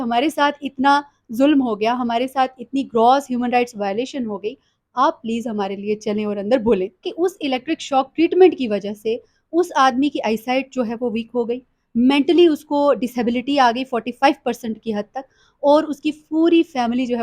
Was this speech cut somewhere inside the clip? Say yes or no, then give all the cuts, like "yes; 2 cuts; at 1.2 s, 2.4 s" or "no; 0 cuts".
yes; 1 cut; at 7.1 s